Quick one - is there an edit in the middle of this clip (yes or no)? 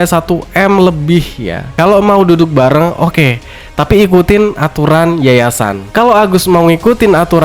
yes